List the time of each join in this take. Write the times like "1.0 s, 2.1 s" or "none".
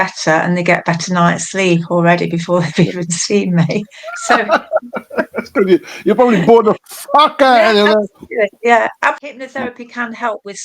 9.2 s